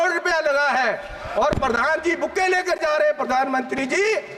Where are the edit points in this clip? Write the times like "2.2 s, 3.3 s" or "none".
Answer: none